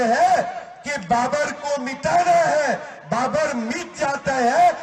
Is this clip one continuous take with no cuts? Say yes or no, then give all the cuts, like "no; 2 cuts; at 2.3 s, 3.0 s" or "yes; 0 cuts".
yes; 0 cuts